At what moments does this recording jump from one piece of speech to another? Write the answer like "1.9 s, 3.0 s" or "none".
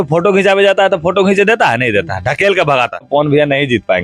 3.1 s